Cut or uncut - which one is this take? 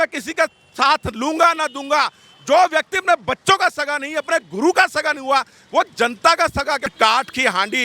cut